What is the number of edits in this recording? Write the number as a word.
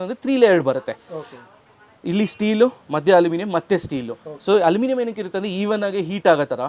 zero